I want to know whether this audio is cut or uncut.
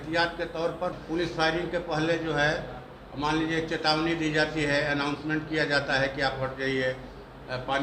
cut